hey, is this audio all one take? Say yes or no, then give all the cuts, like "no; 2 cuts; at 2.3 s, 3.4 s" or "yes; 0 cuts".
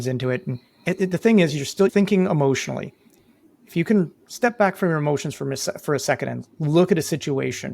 no; 1 cut; at 1.9 s